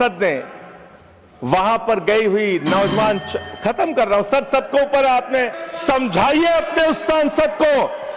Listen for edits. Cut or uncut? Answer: cut